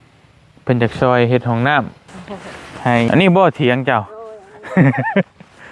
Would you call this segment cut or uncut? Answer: cut